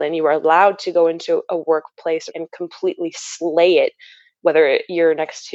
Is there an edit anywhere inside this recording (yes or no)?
yes